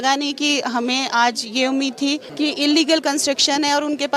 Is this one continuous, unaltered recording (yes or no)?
no